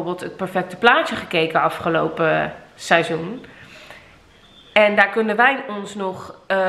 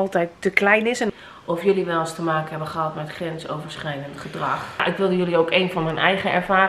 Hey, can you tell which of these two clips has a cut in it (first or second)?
second